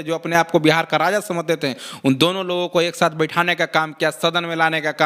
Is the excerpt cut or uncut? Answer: uncut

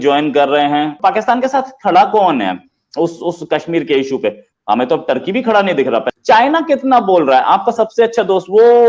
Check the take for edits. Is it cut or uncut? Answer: cut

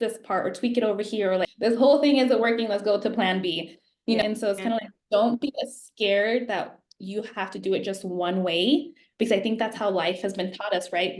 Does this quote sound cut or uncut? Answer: cut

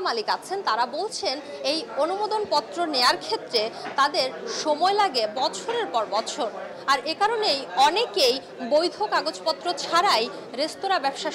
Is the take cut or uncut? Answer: uncut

